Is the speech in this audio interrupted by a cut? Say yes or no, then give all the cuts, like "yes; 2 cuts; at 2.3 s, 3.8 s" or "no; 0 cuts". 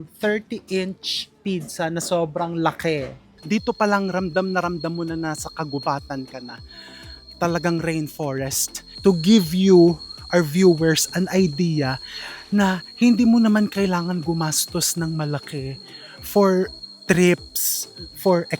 yes; 2 cuts; at 3.3 s, 8.8 s